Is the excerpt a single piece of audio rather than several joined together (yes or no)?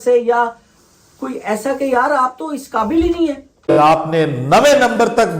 no